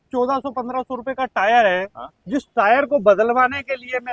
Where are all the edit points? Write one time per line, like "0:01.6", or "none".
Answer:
none